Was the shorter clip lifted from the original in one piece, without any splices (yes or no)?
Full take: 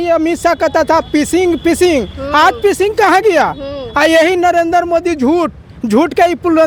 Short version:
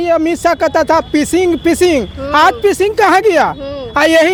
yes